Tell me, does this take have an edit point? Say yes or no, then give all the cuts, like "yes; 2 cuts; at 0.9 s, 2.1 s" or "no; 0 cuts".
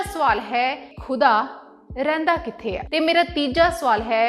yes; 2 cuts; at 0.9 s, 2.8 s